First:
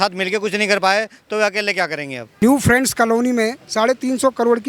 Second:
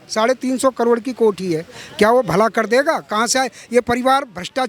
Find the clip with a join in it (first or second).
first